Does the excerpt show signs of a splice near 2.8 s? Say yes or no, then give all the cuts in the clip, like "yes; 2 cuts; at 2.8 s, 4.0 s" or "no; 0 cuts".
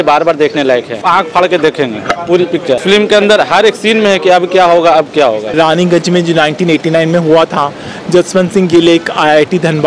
yes; 3 cuts; at 1.0 s, 2.8 s, 5.5 s